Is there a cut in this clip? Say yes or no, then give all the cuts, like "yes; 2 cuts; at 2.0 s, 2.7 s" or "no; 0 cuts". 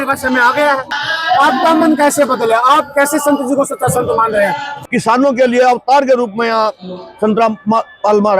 yes; 2 cuts; at 0.9 s, 4.7 s